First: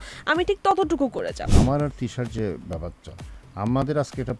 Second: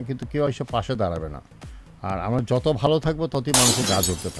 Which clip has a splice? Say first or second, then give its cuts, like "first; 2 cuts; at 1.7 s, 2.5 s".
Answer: first; 1 cut; at 1.5 s